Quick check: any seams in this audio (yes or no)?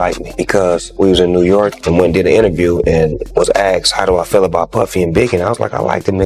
no